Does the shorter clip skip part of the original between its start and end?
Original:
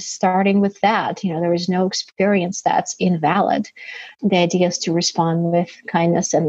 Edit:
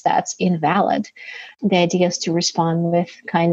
no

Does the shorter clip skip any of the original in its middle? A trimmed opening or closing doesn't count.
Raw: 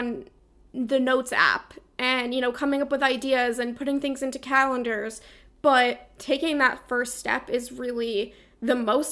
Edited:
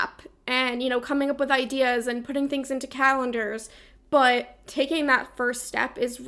no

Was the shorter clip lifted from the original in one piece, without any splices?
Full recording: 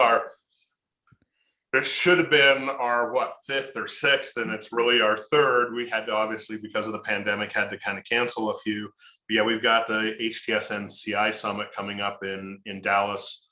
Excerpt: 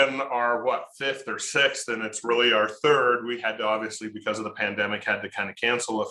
yes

